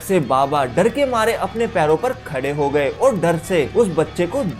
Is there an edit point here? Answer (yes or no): yes